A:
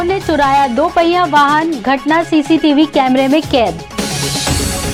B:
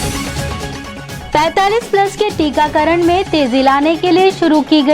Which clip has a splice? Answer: B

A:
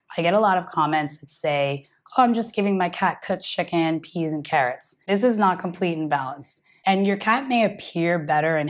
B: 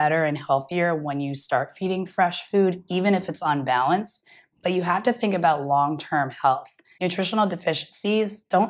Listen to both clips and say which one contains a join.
A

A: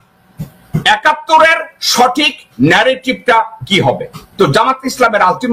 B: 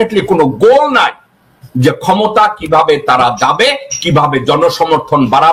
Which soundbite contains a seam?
A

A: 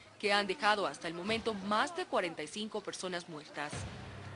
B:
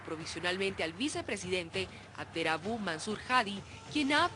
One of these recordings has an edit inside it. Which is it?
B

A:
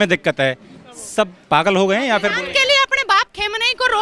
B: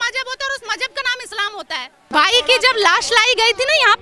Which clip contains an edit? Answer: B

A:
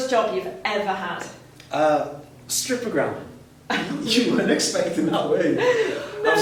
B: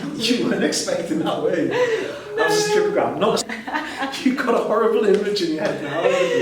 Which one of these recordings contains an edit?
B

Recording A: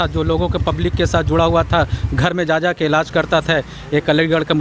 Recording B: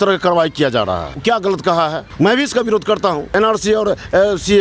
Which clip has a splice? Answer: B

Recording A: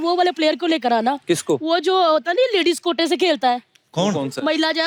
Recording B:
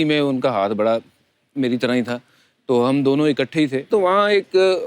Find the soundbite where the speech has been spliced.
B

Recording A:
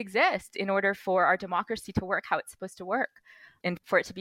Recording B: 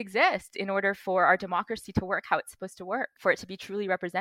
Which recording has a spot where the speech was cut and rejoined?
B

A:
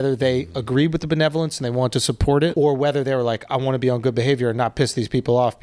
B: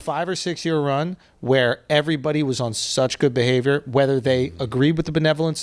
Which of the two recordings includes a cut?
A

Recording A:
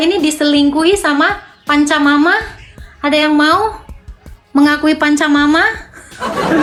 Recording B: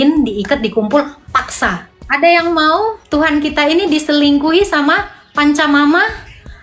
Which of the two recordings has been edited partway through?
B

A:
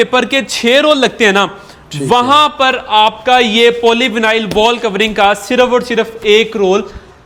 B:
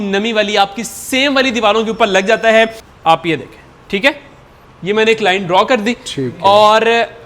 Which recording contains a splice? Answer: B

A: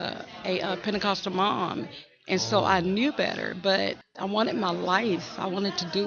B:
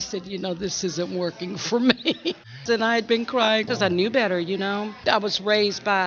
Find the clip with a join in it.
B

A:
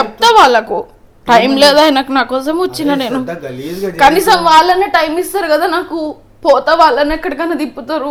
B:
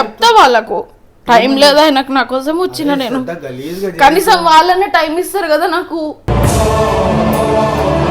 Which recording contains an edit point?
B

